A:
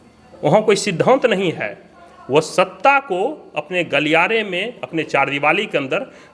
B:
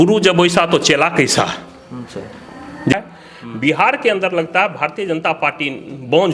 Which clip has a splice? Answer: B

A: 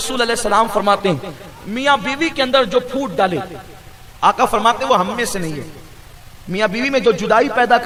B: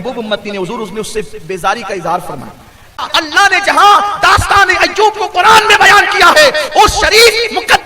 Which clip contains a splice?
B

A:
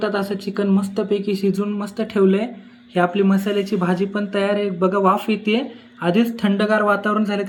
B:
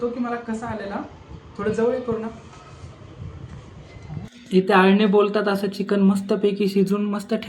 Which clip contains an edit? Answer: B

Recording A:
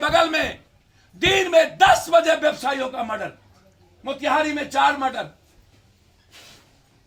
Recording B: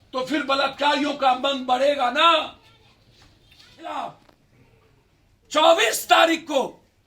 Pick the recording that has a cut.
B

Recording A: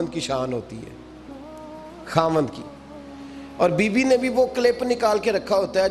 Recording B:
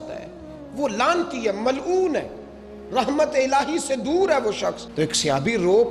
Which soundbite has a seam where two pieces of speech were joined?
B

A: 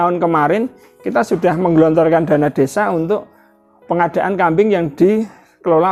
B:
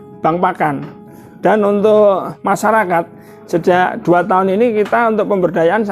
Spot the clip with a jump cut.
B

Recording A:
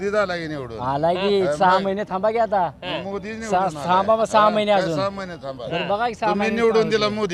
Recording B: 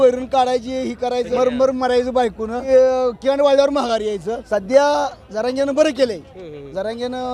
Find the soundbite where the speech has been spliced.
B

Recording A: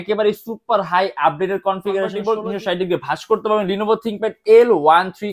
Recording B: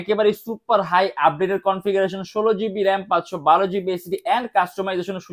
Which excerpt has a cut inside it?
A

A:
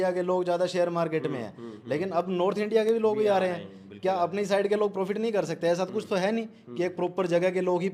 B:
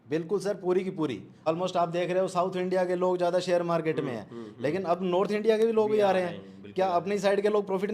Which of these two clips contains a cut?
B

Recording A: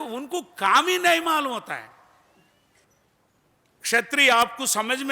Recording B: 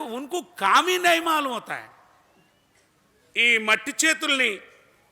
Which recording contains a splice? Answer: A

